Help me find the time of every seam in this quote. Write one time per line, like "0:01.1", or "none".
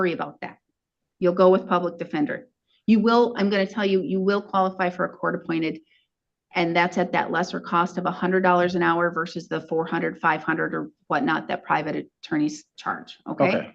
none